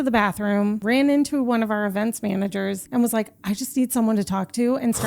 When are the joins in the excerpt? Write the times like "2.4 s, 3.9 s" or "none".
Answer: 0.8 s, 2.8 s